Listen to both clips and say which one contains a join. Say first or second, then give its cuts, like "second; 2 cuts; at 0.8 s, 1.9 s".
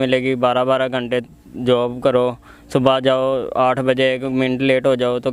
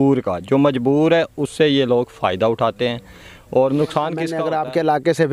second; 1 cut; at 4.3 s